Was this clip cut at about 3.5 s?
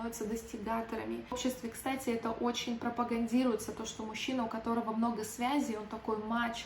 no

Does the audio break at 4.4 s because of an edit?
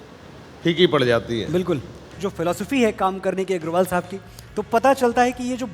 no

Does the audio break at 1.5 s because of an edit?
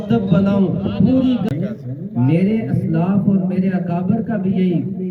yes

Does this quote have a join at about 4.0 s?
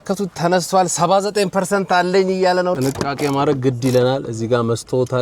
no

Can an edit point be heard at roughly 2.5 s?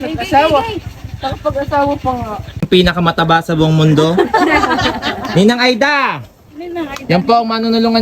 yes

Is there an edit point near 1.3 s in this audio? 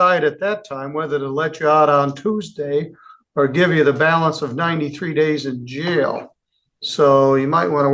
no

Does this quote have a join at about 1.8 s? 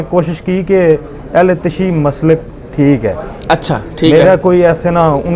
no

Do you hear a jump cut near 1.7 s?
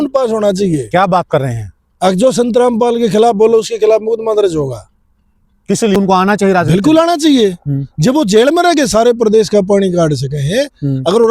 no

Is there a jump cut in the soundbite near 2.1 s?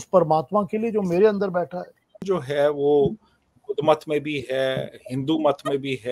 yes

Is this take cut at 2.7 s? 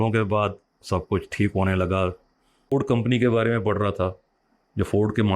yes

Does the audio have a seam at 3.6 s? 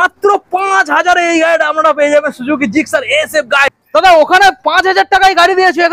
yes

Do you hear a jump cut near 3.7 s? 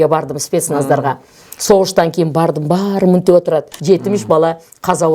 yes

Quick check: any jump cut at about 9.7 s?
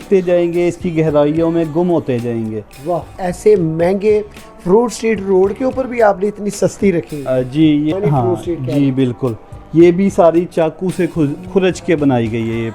no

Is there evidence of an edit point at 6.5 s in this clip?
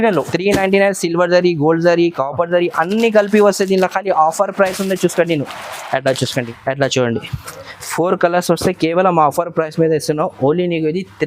yes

